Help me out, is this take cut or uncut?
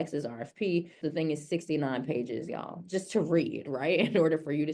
cut